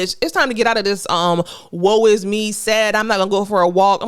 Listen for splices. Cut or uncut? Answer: uncut